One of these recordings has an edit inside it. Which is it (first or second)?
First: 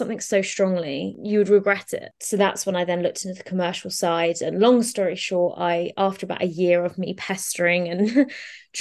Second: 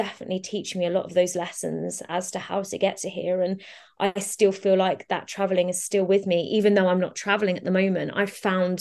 first